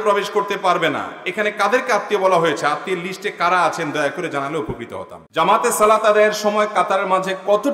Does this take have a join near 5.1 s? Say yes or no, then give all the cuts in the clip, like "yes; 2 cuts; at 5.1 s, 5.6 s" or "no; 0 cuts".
yes; 1 cut; at 5.1 s